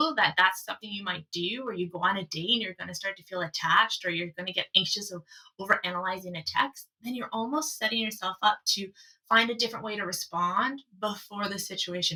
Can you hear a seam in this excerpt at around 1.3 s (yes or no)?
no